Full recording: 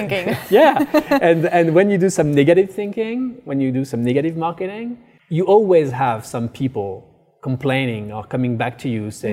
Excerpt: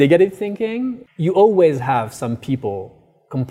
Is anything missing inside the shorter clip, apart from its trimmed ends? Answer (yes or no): yes